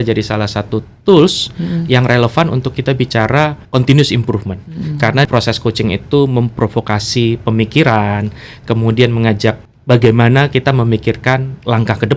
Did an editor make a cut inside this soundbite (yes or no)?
yes